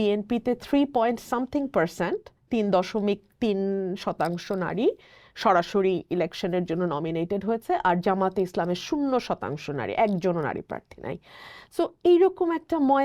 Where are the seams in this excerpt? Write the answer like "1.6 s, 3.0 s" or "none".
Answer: none